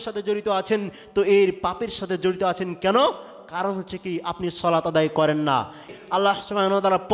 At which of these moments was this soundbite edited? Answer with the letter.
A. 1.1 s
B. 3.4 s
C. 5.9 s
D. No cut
C